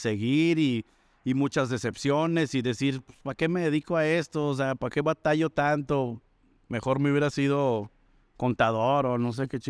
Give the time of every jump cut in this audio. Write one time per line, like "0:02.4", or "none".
none